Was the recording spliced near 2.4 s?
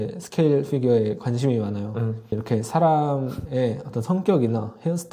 yes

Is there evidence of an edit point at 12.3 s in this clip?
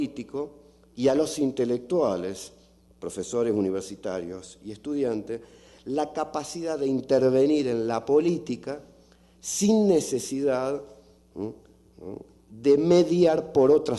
no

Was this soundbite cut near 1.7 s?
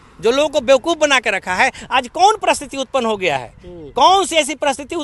no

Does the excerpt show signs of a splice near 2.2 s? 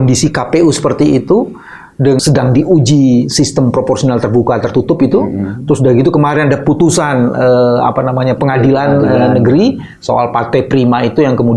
yes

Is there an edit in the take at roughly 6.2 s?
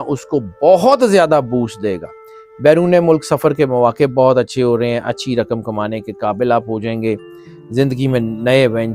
no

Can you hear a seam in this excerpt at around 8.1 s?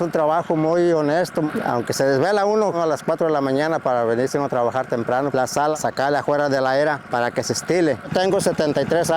yes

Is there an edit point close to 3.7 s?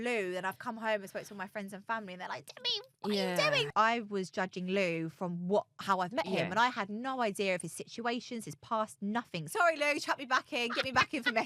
yes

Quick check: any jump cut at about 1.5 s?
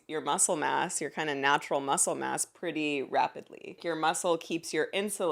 no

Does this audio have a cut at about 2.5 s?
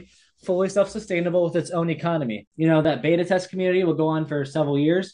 yes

